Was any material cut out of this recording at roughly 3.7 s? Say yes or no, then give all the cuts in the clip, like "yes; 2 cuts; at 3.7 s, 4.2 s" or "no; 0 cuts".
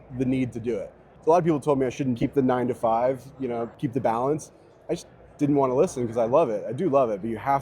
yes; 3 cuts; at 1.0 s, 2.2 s, 3.7 s